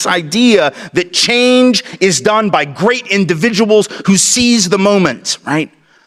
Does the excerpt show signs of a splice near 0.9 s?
no; 0 cuts

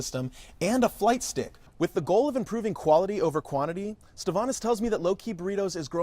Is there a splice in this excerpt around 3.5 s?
no; 1 cut; at 1.6 s

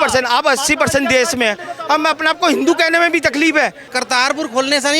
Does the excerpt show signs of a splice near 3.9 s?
yes; 1 cut; at 3.9 s

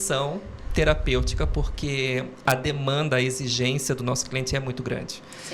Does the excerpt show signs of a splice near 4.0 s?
no; 1 cut; at 2.4 s

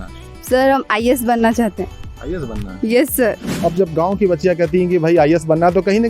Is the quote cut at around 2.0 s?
no; 1 cut; at 3.5 s

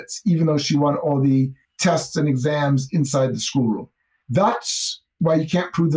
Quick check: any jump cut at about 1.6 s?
yes; 1 cut; at 1.6 s

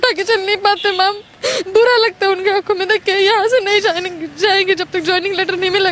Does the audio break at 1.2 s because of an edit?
no; 0 cuts

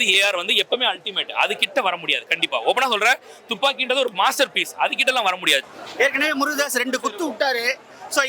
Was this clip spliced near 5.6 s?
yes; 1 cut; at 5.6 s

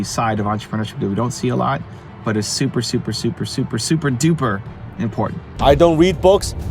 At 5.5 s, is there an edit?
yes; 1 cut; at 5.5 s

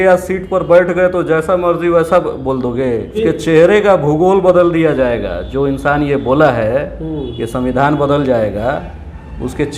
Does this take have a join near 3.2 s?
yes; 1 cut; at 3.2 s

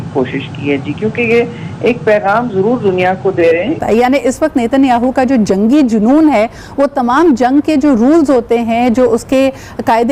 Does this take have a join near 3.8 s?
yes; 1 cut; at 3.8 s

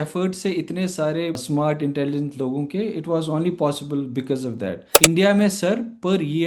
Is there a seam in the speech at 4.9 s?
yes; 2 cuts; at 1.4 s, 4.9 s

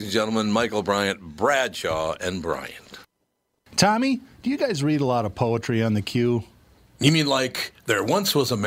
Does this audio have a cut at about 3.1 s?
yes; 1 cut; at 3.1 s

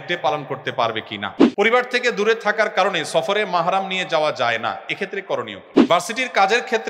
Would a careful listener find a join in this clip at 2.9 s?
no; 2 cuts; at 1.4 s, 5.7 s

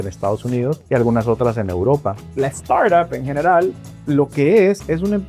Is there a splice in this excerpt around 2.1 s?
yes; 1 cut; at 2.1 s

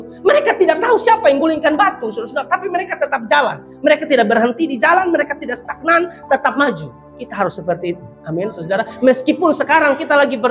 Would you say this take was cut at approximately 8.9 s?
no; 0 cuts

